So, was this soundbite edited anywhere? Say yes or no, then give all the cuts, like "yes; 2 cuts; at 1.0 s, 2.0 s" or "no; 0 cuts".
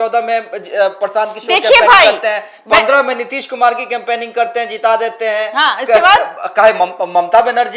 no; 0 cuts